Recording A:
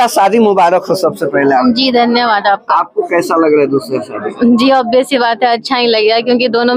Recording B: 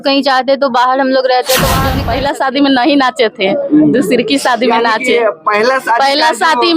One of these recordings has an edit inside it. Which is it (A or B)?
B